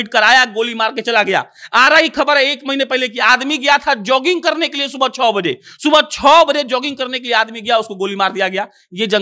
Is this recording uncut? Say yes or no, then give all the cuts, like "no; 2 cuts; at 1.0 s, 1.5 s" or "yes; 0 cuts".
yes; 0 cuts